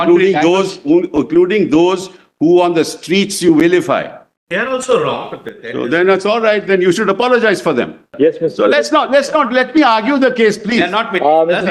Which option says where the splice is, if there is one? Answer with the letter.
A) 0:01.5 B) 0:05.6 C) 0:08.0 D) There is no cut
C